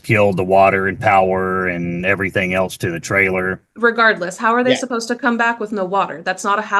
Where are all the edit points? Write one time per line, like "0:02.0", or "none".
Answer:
0:03.6